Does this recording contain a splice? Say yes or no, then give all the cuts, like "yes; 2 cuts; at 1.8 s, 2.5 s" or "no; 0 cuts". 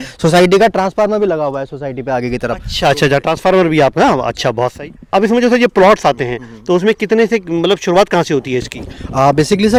no; 0 cuts